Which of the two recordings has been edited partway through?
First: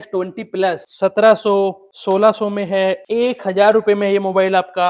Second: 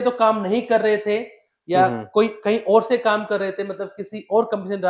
first; 3 cuts; at 0.9 s, 1.9 s, 3.0 s

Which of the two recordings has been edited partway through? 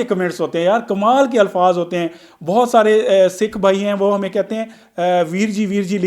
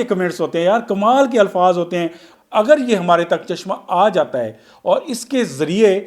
second; 1 cut; at 2.3 s

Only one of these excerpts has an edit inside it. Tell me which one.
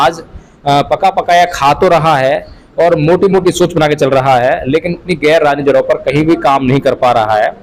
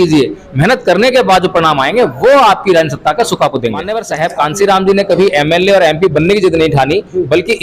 second; 1 cut; at 4.0 s

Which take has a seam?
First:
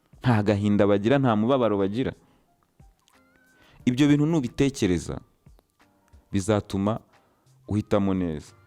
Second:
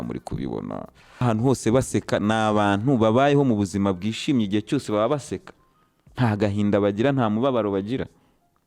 second; 1 cut; at 1.2 s

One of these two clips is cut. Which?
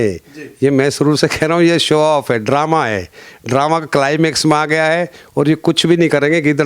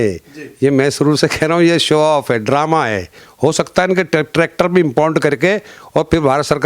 second; 1 cut; at 3.2 s

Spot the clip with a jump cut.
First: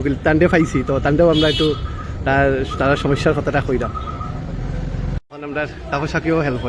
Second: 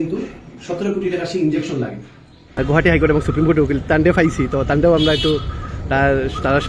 second; 1 cut; at 2.6 s

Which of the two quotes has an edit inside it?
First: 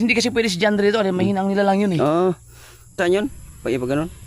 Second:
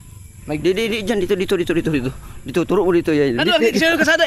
first; 1 cut; at 3.0 s

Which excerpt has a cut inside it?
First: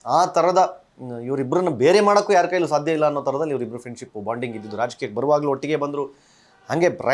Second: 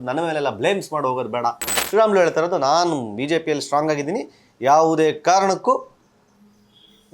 second; 1 cut; at 1.7 s

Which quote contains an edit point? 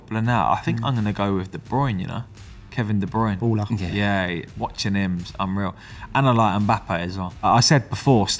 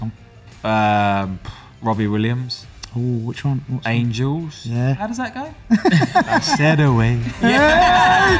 first; 1 cut; at 7.4 s

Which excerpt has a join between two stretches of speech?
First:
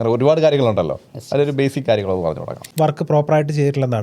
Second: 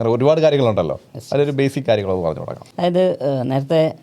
first; 1 cut; at 2.7 s

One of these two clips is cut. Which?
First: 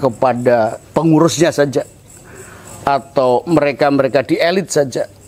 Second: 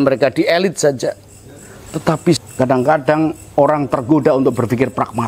second; 1 cut; at 2.4 s

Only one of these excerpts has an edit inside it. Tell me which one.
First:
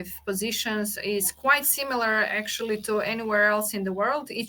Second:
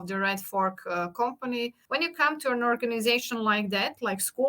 second; 1 cut; at 1.8 s

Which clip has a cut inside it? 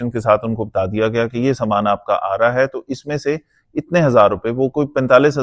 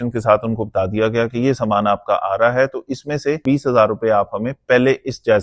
second; 1 cut; at 3.4 s

